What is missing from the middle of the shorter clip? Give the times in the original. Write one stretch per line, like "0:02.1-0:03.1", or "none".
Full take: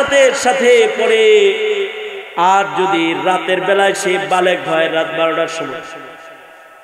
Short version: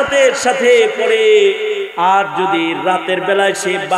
0:01.9-0:02.3